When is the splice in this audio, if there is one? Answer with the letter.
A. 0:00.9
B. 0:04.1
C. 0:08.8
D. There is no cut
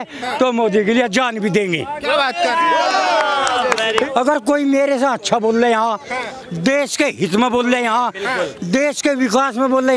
B